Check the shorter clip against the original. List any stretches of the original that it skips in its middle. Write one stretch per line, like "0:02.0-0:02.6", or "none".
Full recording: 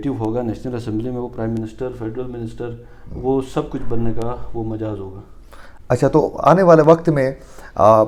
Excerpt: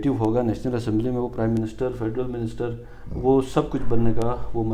none